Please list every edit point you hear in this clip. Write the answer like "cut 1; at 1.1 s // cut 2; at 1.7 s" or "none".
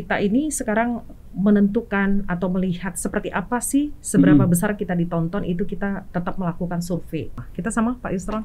cut 1; at 7.4 s

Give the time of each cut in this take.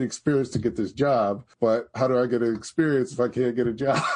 cut 1; at 1.5 s

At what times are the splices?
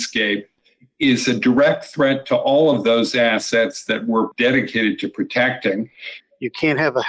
cut 1; at 4.3 s // cut 2; at 6.1 s

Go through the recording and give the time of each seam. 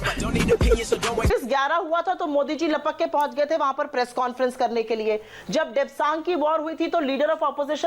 cut 1; at 1.3 s

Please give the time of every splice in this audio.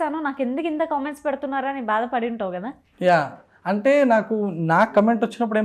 none

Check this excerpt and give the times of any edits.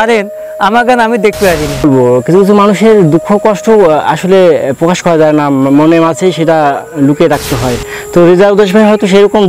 cut 1; at 1.8 s

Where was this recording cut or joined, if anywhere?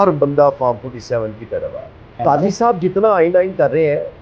cut 1; at 2.1 s

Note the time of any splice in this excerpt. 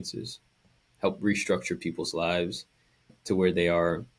cut 1; at 3.1 s

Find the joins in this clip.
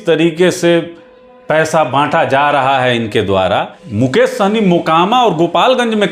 cut 1; at 3.8 s

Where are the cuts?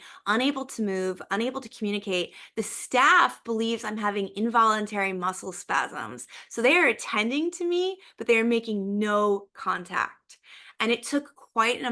none

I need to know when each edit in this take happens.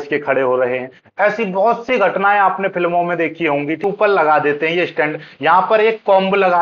cut 1; at 3.8 s

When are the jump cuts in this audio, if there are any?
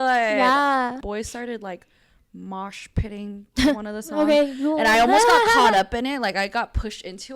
cut 1; at 1.0 s

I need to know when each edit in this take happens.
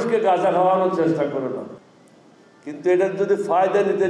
cut 1; at 1.7 s

